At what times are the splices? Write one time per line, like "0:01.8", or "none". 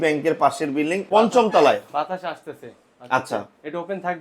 0:01.0